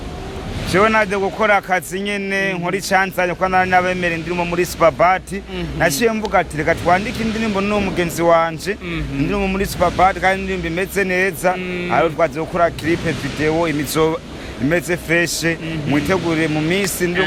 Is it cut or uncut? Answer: uncut